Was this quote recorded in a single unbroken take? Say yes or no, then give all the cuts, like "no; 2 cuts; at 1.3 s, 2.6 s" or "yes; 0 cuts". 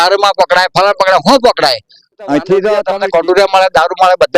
no; 1 cut; at 2.9 s